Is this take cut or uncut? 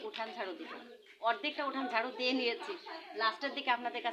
uncut